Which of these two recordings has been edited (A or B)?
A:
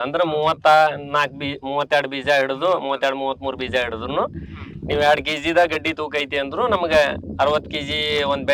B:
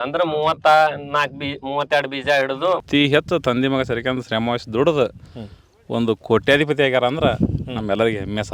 B